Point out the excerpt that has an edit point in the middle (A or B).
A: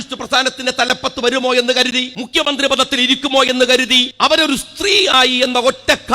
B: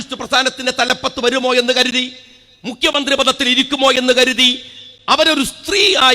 A